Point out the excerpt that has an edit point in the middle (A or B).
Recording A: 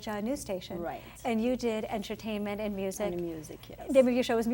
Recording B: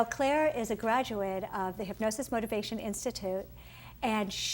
B